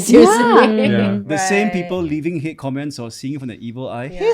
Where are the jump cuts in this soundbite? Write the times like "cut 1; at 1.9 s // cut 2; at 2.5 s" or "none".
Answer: cut 1; at 1.2 s